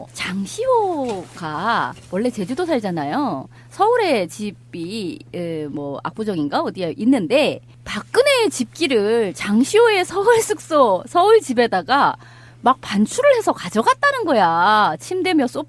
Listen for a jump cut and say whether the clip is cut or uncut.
cut